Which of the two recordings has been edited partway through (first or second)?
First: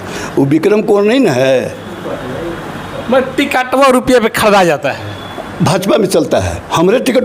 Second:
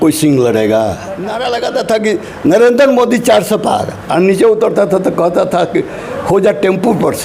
second